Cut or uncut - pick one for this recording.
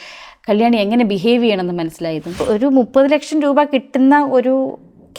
cut